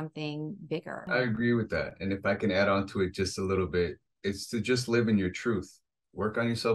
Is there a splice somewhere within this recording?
yes; 1 cut; at 1.1 s

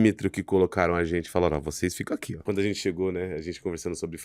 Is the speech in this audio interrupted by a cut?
yes; 1 cut; at 2.4 s

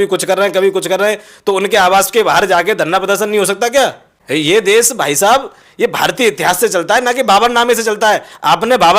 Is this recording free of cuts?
no; 1 cut; at 4.1 s

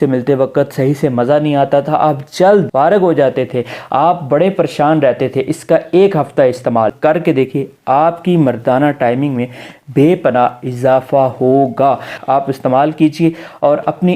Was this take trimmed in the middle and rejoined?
yes; 3 cuts; at 2.7 s, 6.9 s, 12.1 s

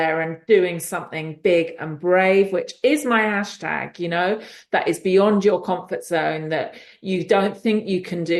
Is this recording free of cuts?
yes; 0 cuts

